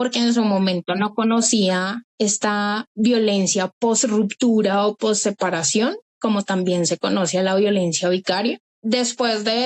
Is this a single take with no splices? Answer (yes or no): no